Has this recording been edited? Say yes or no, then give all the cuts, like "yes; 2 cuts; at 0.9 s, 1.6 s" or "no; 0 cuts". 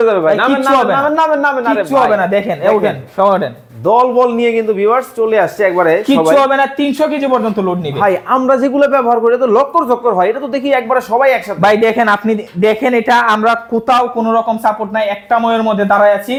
no; 0 cuts